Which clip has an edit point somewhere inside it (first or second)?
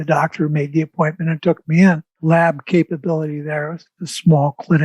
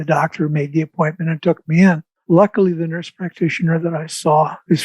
first